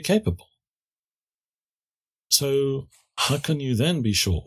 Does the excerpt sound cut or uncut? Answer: uncut